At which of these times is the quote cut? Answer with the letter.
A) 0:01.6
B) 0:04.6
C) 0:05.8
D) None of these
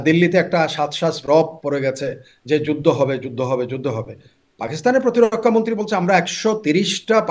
D